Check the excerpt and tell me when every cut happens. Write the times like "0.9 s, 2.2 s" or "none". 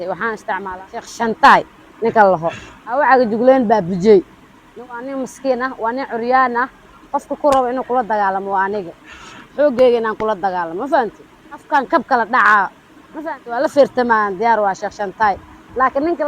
0.9 s, 11.6 s